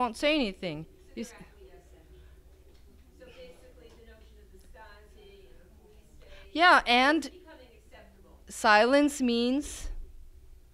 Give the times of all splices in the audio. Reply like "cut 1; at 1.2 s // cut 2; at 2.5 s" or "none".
none